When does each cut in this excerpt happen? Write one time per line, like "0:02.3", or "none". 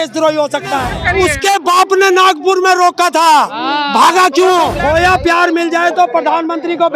0:00.9
0:04.8